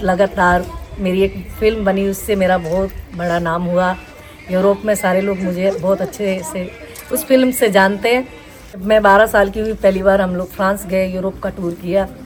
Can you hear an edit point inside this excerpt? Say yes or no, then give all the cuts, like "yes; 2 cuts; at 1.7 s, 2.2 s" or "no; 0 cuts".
no; 0 cuts